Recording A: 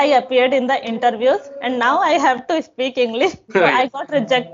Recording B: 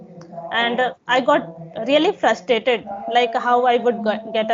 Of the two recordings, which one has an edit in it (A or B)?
A